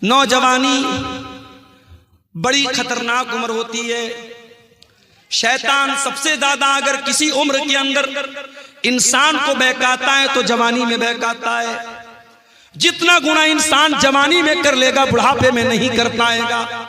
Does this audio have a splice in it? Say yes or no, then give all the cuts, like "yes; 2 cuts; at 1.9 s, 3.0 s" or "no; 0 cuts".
no; 0 cuts